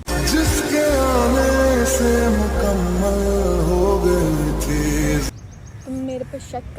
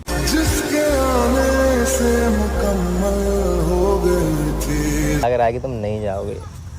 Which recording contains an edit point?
second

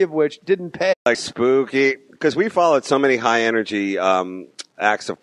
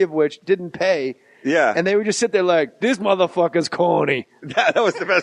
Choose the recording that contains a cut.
second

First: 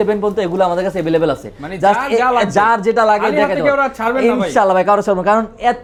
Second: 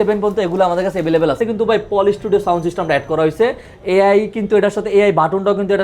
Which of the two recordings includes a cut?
second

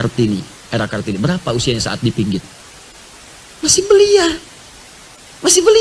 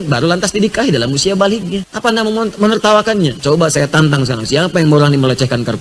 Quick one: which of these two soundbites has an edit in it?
second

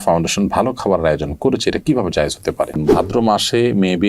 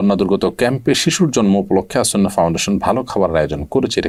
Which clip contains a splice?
first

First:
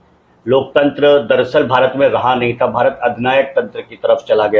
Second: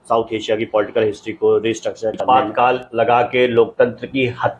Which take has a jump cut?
second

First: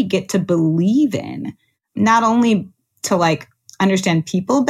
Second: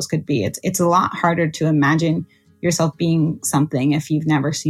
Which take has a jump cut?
first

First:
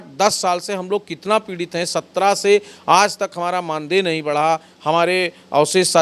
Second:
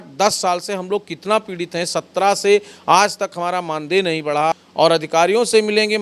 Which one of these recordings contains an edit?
second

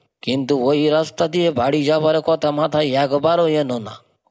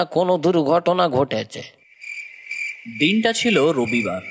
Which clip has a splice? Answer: second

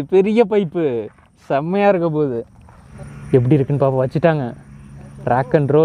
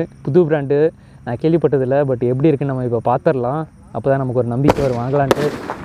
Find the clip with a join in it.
first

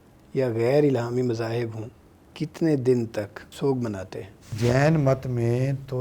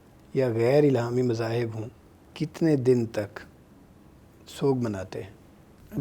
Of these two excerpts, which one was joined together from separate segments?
first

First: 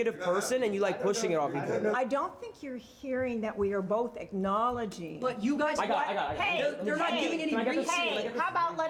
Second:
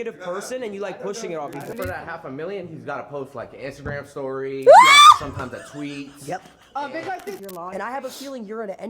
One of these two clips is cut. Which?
second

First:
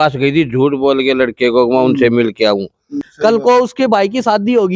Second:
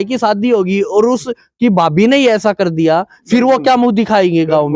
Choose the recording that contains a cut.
first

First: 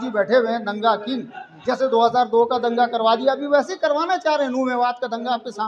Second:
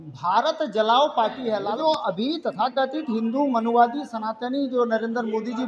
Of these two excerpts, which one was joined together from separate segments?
second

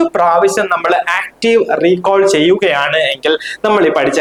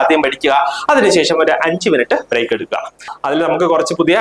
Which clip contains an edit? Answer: second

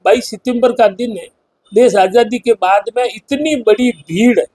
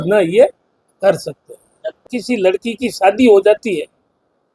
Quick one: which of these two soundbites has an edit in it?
second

